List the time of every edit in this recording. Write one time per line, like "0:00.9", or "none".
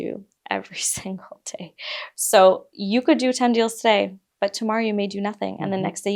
none